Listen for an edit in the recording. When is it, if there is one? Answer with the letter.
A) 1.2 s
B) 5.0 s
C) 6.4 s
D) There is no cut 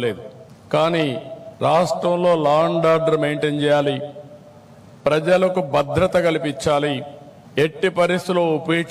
C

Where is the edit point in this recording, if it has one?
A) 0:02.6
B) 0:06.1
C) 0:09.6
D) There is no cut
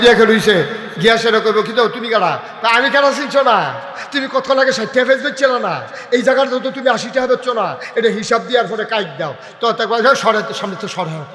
D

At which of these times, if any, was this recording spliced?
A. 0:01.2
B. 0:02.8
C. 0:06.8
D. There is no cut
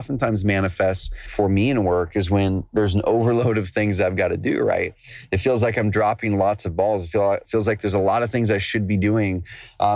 A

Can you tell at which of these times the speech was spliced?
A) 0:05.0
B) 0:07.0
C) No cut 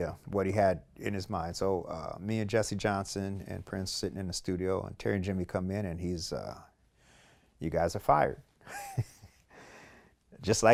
C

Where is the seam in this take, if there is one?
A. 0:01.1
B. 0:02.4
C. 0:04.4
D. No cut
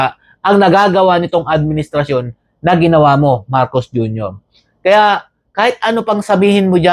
D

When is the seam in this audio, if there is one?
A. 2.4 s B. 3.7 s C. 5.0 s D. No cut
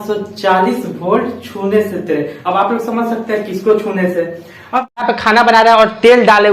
C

